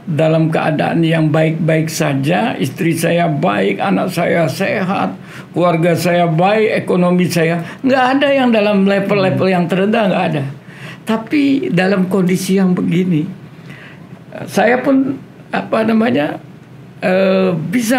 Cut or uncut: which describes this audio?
uncut